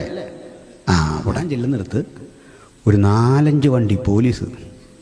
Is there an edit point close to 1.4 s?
yes; 1 cut; at 1.4 s

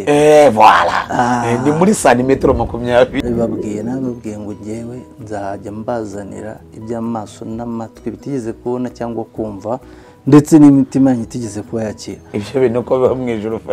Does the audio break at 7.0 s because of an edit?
no; 1 cut; at 3.1 s

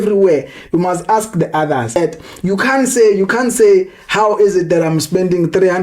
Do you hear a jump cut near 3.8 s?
no; 1 cut; at 1.9 s

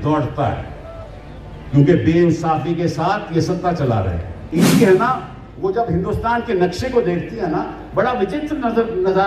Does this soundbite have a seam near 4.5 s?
yes; 1 cut; at 4.5 s

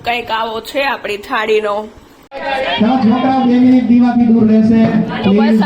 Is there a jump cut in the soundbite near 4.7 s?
no; 1 cut; at 2.2 s

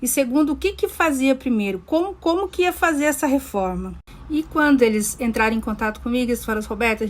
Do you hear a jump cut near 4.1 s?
yes; 1 cut; at 4.1 s

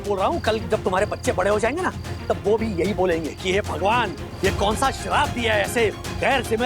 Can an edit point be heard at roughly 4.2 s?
yes; 1 cut; at 4.2 s

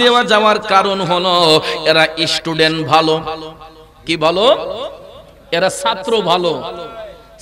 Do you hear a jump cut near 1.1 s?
no; 0 cuts

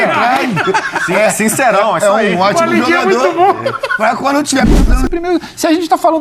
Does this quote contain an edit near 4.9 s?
yes; 1 cut; at 4.9 s

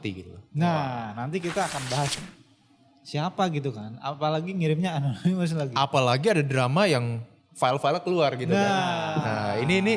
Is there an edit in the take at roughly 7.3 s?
no; 1 cut; at 2.2 s

